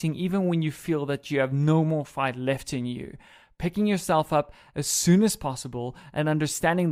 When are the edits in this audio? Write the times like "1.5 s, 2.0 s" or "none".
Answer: none